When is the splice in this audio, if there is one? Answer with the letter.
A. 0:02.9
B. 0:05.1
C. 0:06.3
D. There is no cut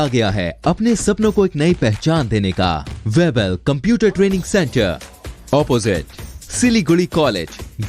A